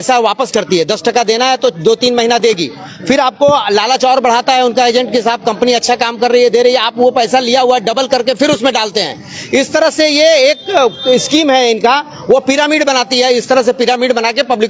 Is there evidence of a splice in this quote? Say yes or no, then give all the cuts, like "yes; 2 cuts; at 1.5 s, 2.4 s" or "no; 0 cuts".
no; 0 cuts